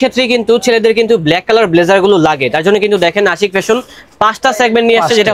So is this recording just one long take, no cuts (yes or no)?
yes